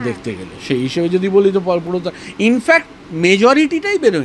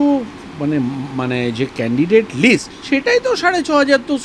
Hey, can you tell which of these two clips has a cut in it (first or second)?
second